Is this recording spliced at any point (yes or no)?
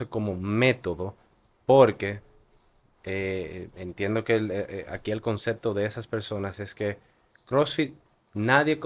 no